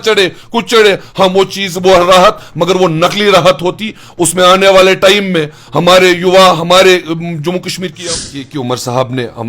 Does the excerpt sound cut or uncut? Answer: cut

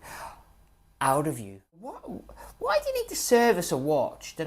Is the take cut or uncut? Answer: cut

